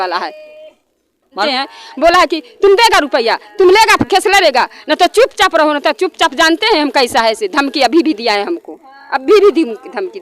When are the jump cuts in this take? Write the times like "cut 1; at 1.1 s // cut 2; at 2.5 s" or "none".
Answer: cut 1; at 1.4 s